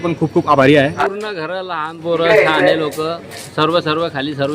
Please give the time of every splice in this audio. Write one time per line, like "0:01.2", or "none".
0:01.0

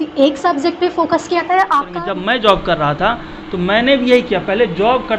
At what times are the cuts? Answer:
0:01.9

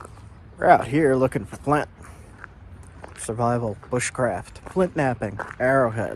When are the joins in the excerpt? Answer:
none

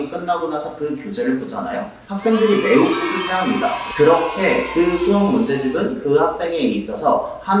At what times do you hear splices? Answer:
0:03.8

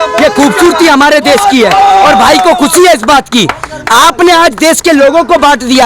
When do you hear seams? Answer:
none

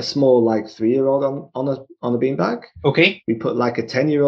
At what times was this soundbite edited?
none

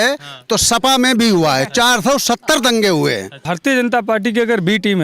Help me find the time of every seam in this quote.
0:03.5

